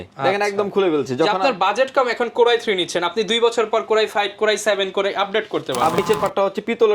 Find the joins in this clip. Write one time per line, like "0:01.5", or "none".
0:05.9